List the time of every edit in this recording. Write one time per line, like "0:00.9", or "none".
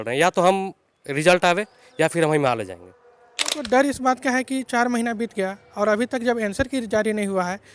0:03.6